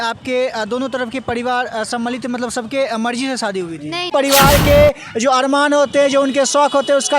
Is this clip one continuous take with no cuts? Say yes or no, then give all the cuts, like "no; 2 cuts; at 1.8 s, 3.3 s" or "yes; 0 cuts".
no; 1 cut; at 4.1 s